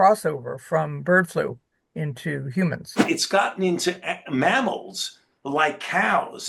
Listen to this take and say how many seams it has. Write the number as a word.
one